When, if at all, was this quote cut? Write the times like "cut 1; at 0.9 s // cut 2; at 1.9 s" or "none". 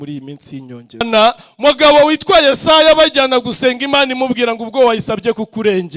cut 1; at 1.1 s